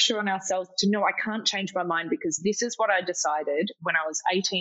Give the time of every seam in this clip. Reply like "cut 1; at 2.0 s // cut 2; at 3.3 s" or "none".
none